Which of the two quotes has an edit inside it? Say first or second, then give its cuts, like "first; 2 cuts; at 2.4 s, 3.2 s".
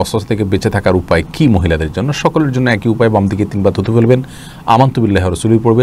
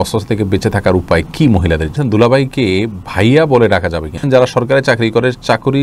second; 2 cuts; at 1.9 s, 4.2 s